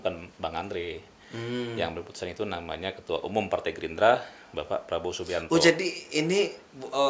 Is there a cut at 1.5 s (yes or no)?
no